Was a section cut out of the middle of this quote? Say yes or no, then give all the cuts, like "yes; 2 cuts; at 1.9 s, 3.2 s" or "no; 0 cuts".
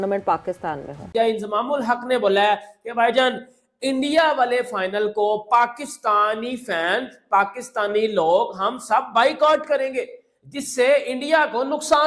yes; 1 cut; at 1.0 s